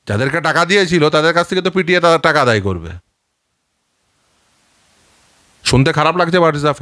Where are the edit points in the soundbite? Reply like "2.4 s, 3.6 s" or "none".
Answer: none